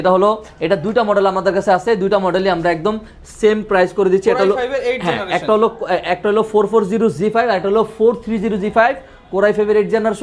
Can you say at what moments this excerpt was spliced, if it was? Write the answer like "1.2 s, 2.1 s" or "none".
none